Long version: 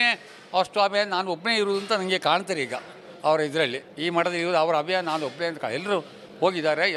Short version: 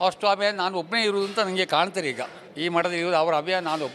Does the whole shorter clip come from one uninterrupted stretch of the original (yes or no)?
no